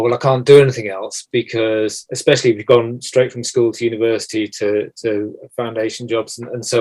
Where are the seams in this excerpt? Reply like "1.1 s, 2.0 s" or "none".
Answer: none